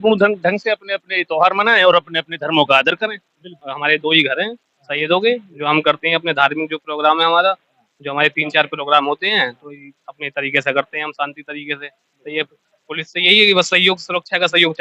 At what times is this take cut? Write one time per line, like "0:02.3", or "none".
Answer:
0:03.4